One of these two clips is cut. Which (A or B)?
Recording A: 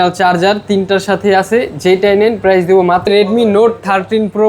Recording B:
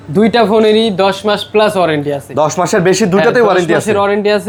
A